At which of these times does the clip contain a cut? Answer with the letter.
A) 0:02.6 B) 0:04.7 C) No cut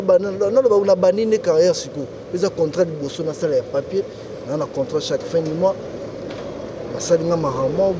C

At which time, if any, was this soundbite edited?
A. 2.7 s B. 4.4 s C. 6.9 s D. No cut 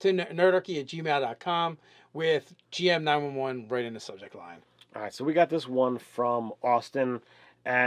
A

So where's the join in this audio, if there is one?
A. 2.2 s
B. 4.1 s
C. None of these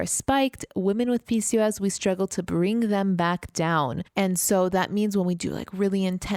C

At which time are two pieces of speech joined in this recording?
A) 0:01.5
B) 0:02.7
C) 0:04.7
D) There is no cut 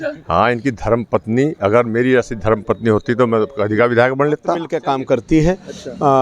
C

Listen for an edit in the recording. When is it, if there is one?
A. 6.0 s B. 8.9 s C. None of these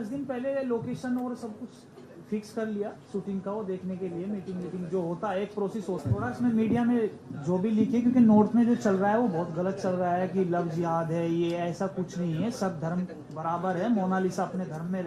A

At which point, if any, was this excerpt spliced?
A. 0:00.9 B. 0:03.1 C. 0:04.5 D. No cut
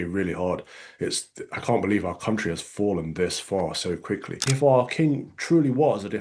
C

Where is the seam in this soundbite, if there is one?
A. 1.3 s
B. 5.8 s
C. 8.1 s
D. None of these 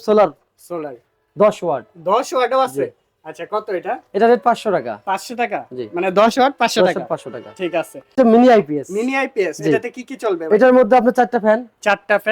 C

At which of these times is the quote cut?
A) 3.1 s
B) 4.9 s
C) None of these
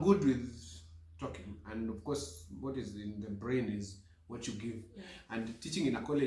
C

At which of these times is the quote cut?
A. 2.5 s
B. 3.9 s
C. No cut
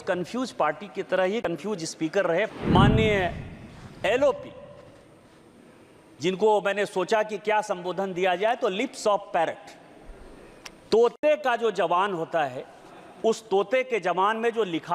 A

